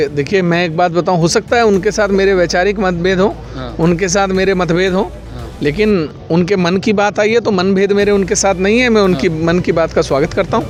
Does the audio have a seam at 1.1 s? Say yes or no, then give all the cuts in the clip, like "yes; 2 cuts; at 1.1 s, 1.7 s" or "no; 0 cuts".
no; 0 cuts